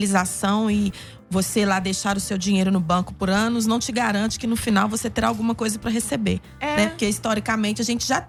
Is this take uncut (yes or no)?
yes